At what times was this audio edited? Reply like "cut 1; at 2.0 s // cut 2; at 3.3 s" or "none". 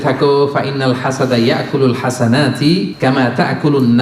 cut 1; at 2.9 s